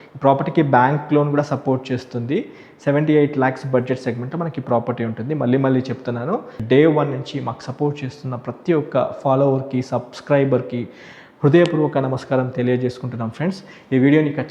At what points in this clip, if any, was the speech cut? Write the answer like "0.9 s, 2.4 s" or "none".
6.5 s